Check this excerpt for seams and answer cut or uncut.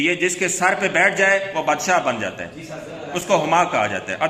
uncut